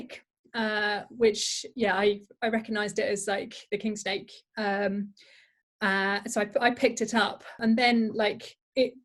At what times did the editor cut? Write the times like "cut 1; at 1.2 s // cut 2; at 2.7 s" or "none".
cut 1; at 7.6 s